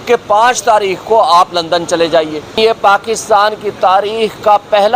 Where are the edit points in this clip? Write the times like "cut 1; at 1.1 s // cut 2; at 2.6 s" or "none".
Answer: cut 1; at 2.6 s